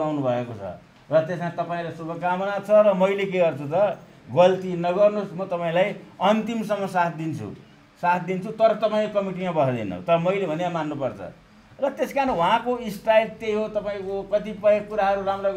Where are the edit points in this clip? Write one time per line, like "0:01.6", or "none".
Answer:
none

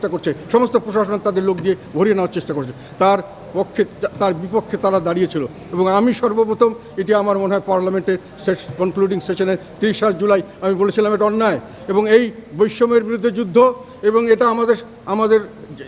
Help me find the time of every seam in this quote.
none

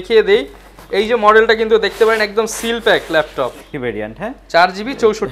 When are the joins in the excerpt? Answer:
0:03.7

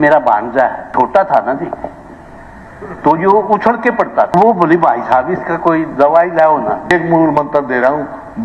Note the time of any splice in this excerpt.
0:00.9
0:04.3
0:06.9

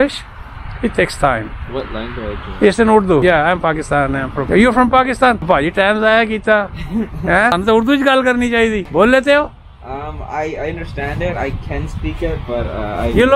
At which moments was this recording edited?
0:03.2
0:04.4
0:05.5
0:07.5
0:08.8

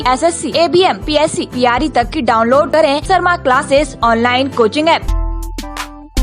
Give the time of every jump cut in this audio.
0:05.1

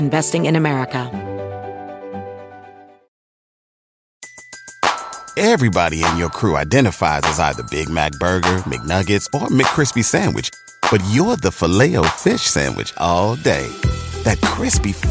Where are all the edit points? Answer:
0:01.1

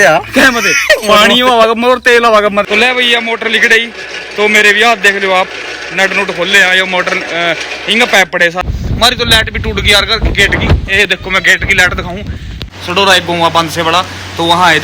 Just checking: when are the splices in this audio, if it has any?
0:02.7
0:08.6
0:12.6

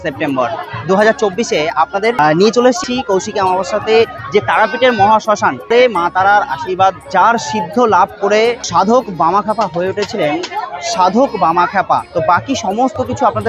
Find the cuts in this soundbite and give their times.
0:02.2
0:02.8
0:05.7
0:07.1
0:08.6
0:12.1

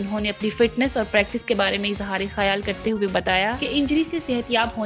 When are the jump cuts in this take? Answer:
none

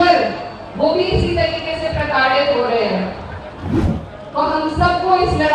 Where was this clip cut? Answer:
0:03.7

